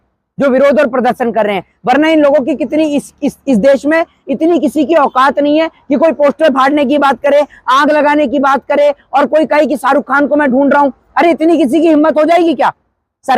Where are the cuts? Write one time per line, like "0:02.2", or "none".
none